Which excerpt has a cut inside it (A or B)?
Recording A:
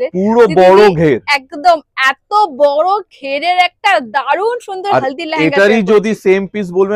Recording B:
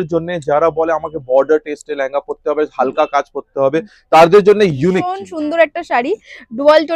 B